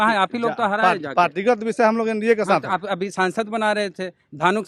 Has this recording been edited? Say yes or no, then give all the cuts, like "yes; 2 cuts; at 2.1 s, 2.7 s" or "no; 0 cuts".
no; 0 cuts